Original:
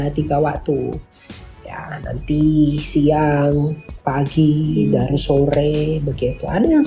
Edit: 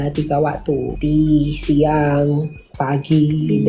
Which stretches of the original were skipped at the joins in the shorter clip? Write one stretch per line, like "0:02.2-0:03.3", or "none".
0:00.9-0:02.2